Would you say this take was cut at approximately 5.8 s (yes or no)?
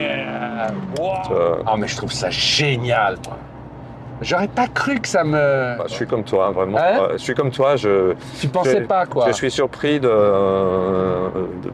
yes